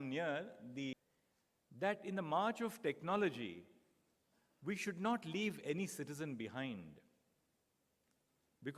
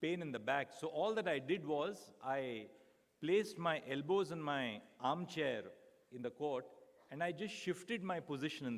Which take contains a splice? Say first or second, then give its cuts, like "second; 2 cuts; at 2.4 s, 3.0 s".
first; 1 cut; at 1.1 s